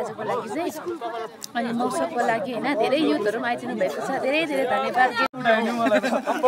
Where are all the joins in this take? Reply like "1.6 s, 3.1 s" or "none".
5.2 s